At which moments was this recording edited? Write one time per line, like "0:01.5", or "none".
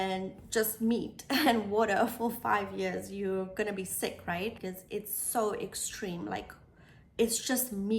0:04.6